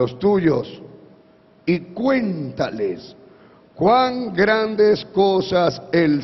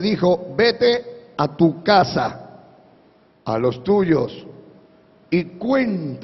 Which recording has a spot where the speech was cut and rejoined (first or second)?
second